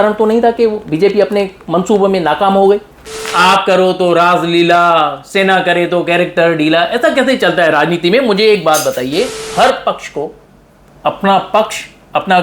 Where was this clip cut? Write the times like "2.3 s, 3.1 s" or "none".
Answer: 3.3 s, 9.4 s

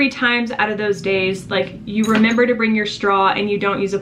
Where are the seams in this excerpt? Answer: none

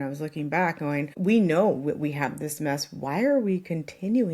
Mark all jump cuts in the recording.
1.1 s

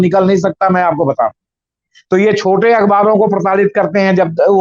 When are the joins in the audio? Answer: 1.9 s

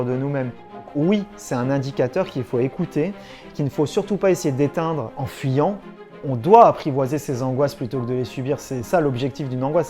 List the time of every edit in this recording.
0.9 s, 5.2 s, 6.2 s

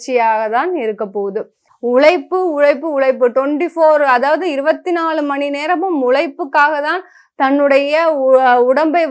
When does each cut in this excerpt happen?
1.6 s

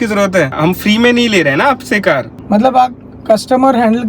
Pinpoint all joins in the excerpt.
2.4 s

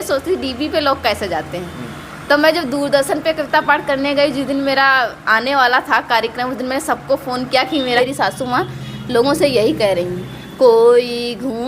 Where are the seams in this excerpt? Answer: 8.0 s

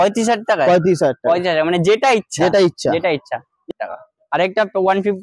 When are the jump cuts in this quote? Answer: 3.7 s

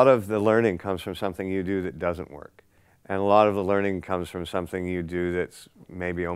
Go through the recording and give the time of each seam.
none

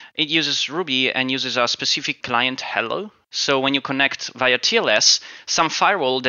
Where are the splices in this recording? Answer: 2.2 s, 3.2 s

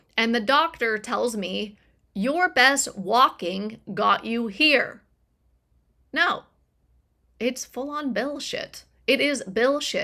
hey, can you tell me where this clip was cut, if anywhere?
none

